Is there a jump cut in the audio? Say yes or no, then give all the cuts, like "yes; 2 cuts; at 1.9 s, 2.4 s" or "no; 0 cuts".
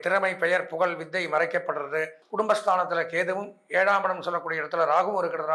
yes; 1 cut; at 2.2 s